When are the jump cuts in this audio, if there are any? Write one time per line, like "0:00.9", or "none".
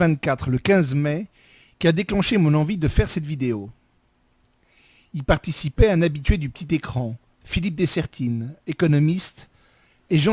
none